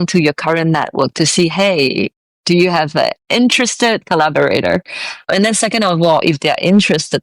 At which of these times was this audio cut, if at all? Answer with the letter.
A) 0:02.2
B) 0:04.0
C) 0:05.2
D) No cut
B